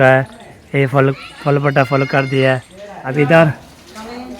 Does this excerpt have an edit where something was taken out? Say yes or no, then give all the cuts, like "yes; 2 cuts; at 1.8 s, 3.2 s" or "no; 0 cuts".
yes; 1 cut; at 3.0 s